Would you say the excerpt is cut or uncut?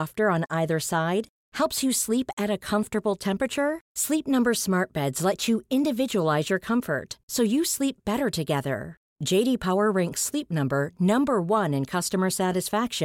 uncut